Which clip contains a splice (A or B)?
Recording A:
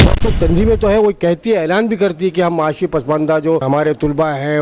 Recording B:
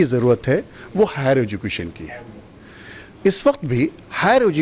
A